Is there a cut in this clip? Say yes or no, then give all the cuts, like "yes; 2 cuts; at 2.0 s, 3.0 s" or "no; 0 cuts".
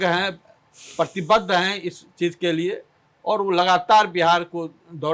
no; 0 cuts